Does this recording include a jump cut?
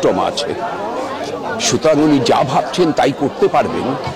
no; 0 cuts

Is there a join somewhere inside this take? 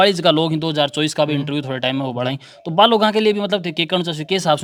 no; 0 cuts

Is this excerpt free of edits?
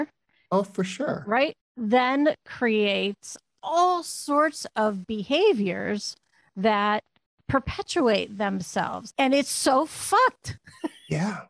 no; 2 cuts; at 1.6 s, 9.0 s

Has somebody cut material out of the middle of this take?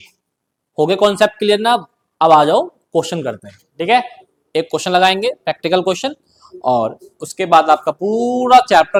no; 0 cuts

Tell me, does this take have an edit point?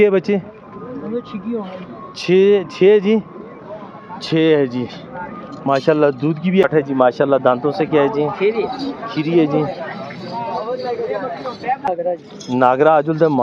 yes; 2 cuts; at 6.6 s, 11.8 s

